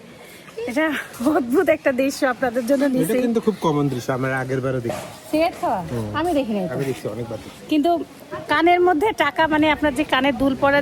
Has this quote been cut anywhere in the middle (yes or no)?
no